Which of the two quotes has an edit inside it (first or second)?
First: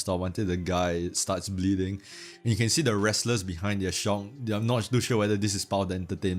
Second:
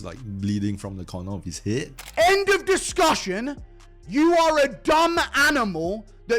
second